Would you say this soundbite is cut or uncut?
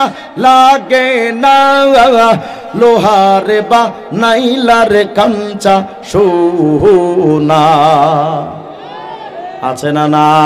uncut